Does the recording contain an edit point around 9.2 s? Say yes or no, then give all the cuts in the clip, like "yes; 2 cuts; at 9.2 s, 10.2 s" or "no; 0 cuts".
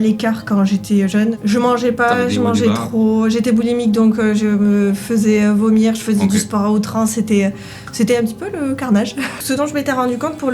yes; 2 cuts; at 1.3 s, 9.2 s